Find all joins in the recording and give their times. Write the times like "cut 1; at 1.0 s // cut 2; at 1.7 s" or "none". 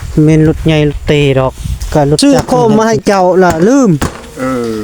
cut 1; at 2.2 s